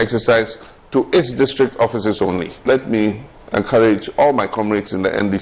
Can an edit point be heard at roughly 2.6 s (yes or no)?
yes